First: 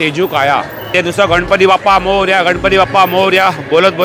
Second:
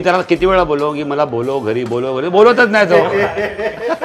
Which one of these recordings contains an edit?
first; 1 cut; at 0.9 s

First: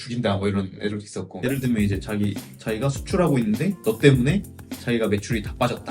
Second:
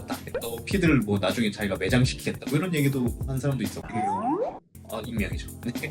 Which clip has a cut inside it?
first; 1 cut; at 1.3 s

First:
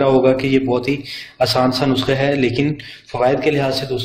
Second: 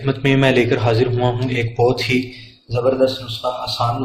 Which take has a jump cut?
first; 1 cut; at 2.2 s

